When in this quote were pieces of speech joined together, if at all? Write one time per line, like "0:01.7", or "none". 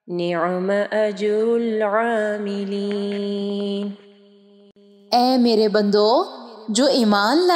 0:04.5